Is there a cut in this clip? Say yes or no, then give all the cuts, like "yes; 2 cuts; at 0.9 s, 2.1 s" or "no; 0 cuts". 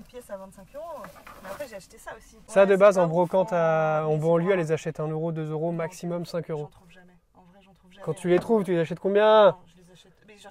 yes; 1 cut; at 2.5 s